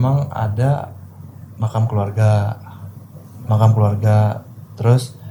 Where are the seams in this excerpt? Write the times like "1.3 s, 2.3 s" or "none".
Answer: none